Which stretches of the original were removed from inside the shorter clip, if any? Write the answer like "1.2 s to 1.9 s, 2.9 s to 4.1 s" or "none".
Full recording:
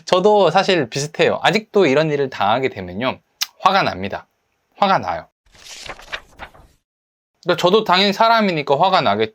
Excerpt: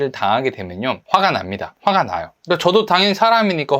3.4 s to 4.2 s, 5.3 s to 7.3 s